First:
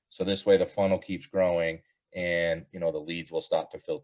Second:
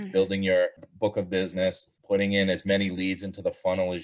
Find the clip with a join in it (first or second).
second